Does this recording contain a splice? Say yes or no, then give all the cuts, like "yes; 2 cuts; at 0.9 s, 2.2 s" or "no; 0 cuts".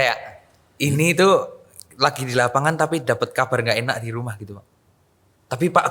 no; 0 cuts